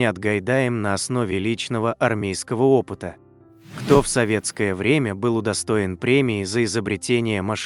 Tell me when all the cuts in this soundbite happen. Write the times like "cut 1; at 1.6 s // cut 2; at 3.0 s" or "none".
cut 1; at 3.1 s

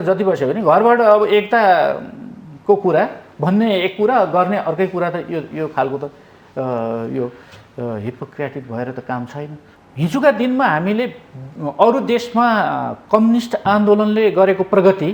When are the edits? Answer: cut 1; at 9.7 s

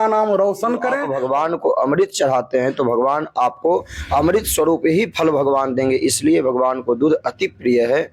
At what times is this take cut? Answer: cut 1; at 1.1 s

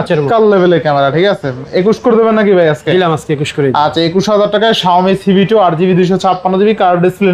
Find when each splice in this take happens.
none

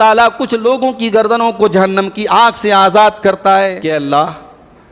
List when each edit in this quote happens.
cut 1; at 3.9 s

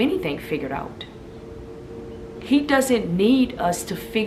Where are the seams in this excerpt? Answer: none

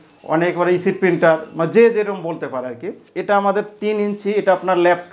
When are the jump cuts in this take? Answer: cut 1; at 3.1 s

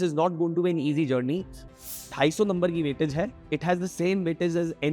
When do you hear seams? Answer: cut 1; at 1.6 s

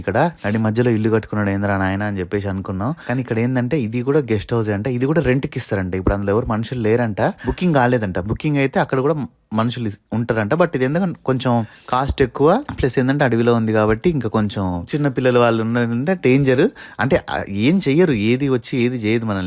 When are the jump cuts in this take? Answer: none

